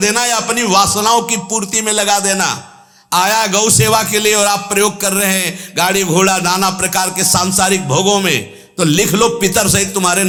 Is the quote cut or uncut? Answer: uncut